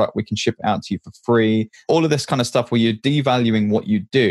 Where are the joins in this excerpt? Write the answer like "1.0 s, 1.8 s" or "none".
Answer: 1.8 s